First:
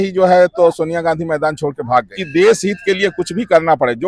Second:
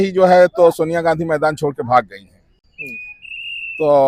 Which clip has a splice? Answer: first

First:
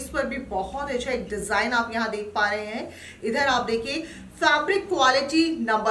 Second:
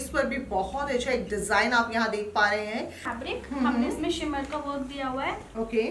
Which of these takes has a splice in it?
second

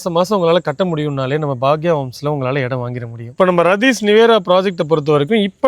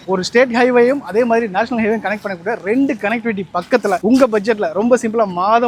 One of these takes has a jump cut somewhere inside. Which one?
first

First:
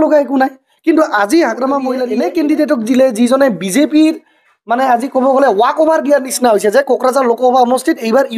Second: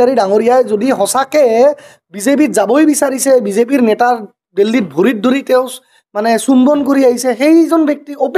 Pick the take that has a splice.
first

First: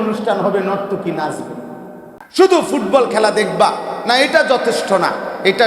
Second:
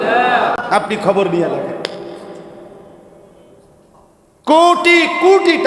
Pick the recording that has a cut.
first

